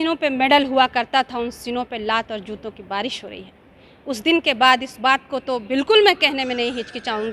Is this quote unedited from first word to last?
yes; 0 cuts

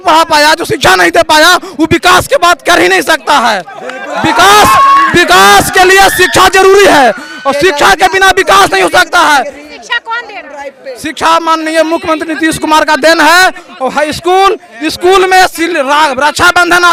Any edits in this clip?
no; 0 cuts

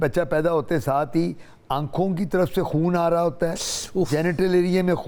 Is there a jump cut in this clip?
no; 0 cuts

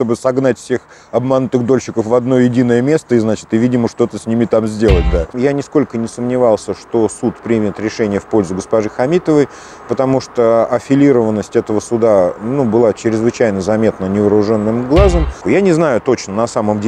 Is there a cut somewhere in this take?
yes; 2 cuts; at 5.3 s, 15.4 s

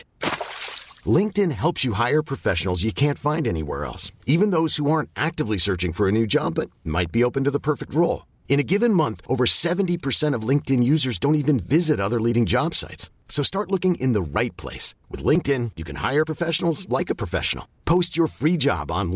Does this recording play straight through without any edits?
yes; 0 cuts

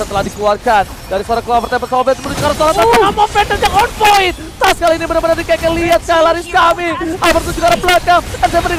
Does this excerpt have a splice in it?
no; 0 cuts

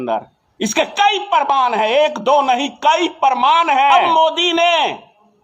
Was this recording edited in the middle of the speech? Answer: yes; 1 cut; at 4.0 s

